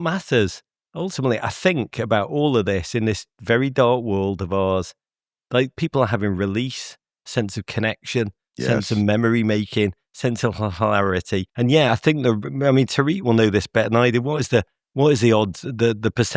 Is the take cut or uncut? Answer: cut